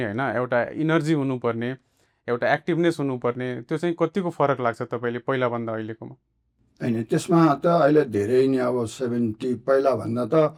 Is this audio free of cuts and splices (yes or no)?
yes